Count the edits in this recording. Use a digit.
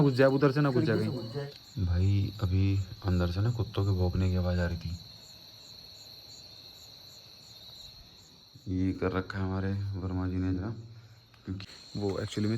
2